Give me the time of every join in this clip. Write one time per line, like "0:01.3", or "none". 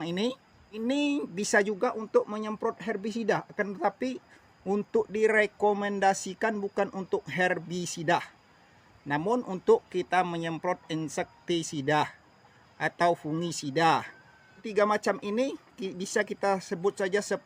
0:14.7